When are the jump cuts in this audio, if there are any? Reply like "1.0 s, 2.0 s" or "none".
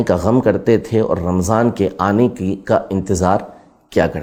none